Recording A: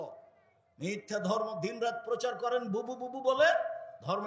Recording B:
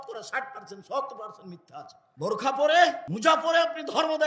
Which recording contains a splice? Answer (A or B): B